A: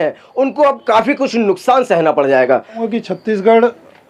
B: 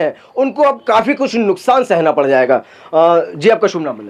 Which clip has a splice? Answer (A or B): A